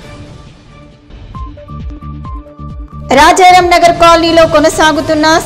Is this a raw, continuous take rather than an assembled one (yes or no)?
no